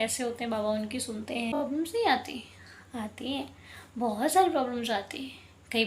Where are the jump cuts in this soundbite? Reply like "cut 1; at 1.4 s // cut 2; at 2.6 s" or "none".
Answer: cut 1; at 1.6 s